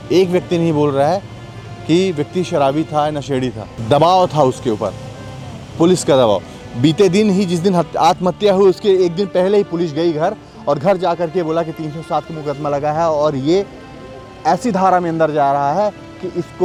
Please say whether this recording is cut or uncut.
uncut